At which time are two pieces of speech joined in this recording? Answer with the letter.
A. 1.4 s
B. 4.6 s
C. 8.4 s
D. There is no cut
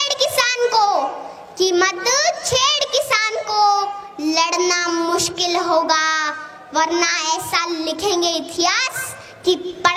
D